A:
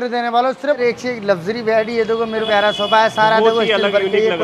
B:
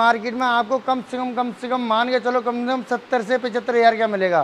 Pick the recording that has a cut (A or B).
A